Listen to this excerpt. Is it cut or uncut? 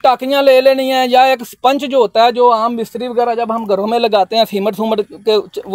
uncut